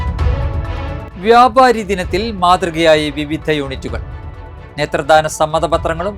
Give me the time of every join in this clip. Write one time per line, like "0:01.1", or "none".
0:01.1